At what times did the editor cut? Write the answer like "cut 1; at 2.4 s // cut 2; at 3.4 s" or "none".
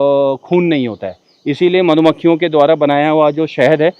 none